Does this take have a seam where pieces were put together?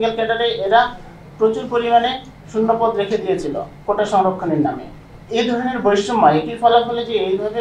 no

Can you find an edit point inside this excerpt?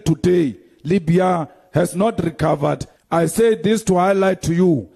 yes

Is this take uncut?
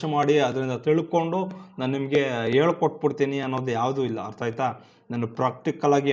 yes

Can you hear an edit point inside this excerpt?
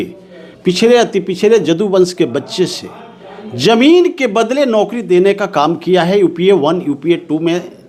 no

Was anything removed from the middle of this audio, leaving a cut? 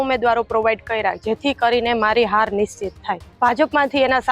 yes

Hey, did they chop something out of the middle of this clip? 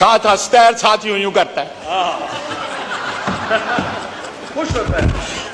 no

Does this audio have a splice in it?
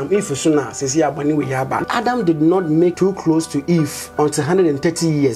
yes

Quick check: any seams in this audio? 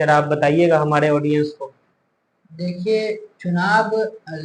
no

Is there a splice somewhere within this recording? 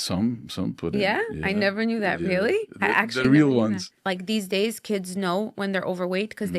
yes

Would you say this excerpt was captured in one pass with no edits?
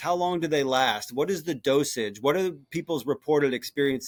yes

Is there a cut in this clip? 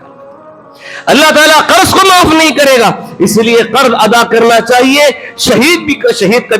no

